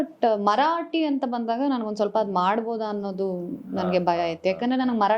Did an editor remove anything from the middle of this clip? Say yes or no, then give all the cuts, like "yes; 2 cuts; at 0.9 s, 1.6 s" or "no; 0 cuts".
no; 0 cuts